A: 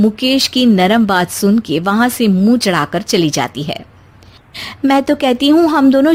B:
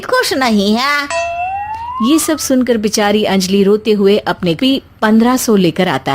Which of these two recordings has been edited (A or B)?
B